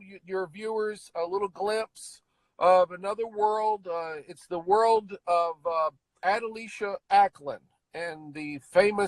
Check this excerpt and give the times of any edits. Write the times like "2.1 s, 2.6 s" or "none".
6.1 s